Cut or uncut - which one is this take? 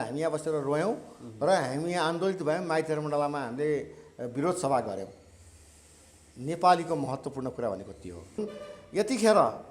cut